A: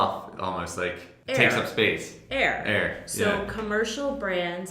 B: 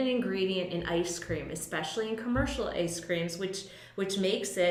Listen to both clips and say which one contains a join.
A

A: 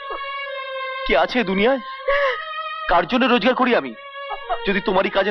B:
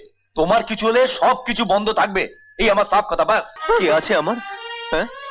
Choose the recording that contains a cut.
B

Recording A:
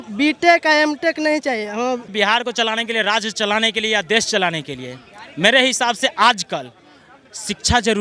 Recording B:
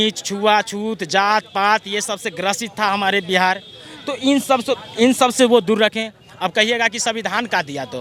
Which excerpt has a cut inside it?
A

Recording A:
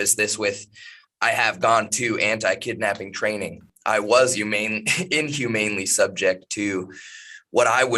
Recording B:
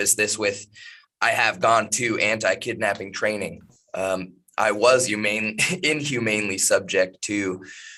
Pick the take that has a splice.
A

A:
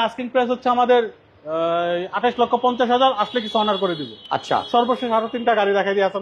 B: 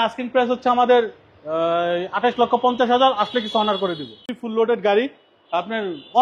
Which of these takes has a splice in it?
B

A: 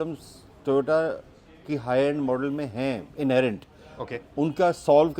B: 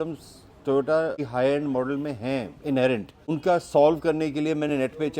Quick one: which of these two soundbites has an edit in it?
B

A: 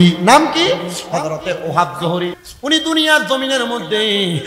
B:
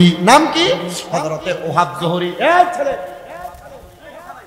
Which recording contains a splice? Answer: A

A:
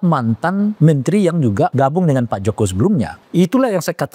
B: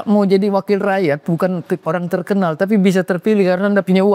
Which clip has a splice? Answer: A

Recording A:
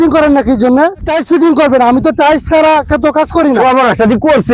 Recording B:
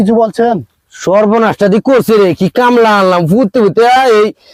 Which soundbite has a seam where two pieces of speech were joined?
A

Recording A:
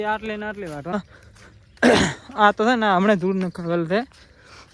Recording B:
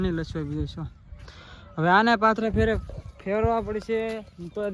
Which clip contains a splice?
A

